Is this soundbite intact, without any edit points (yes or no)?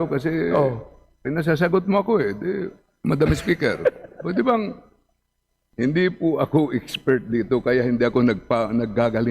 no